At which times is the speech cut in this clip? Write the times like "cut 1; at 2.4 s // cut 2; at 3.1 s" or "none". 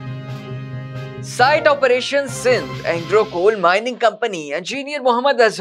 cut 1; at 1.3 s